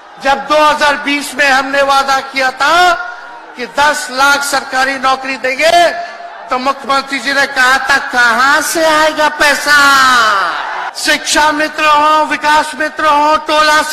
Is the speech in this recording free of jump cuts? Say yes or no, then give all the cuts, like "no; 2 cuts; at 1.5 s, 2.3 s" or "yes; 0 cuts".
no; 1 cut; at 10.9 s